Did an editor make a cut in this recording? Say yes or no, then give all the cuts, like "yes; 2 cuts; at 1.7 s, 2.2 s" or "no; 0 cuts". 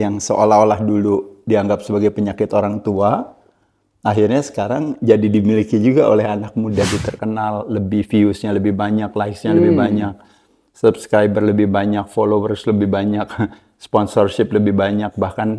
yes; 1 cut; at 6.8 s